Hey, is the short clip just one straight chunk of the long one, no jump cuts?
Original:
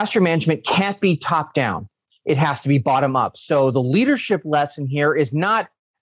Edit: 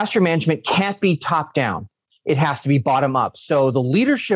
yes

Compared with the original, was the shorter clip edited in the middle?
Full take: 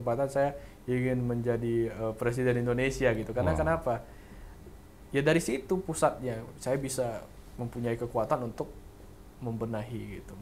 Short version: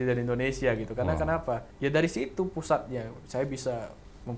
yes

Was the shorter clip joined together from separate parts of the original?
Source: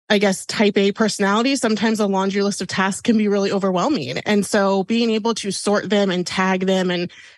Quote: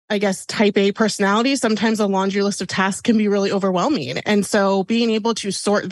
no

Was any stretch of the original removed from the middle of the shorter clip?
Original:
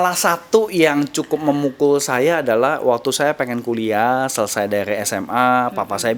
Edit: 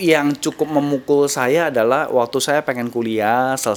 no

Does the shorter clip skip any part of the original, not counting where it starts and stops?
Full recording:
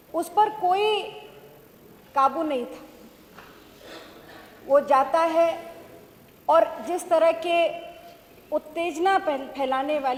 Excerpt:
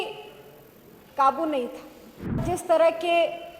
yes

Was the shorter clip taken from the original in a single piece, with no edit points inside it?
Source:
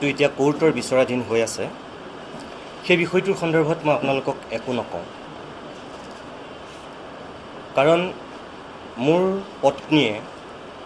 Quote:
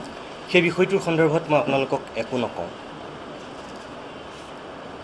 yes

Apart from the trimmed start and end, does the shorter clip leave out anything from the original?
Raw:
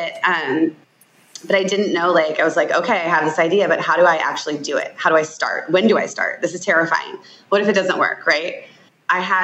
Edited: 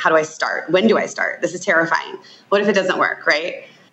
no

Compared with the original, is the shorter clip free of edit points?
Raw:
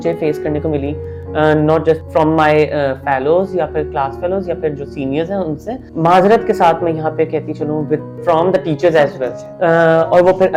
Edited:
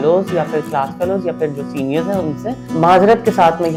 yes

